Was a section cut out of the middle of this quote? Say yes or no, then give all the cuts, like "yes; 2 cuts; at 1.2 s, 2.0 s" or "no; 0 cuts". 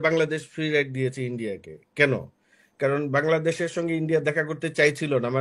no; 0 cuts